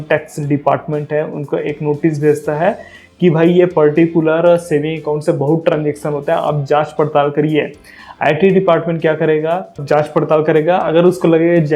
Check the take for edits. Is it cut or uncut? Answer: cut